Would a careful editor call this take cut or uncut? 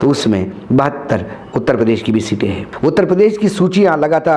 cut